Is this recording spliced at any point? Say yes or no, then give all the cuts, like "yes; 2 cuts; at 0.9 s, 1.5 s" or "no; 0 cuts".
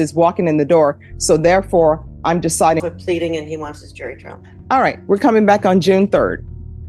yes; 1 cut; at 2.8 s